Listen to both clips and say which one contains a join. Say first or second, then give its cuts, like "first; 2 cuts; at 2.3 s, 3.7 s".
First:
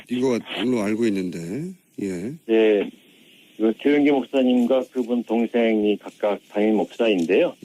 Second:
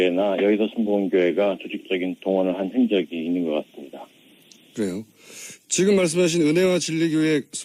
first; 1 cut; at 2.9 s